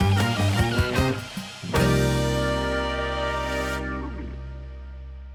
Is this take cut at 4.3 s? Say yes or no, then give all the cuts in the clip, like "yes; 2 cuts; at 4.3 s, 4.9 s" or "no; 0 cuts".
no; 0 cuts